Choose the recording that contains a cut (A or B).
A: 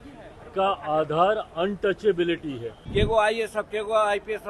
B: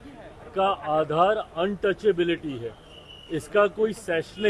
A